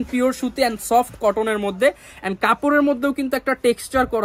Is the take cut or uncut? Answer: uncut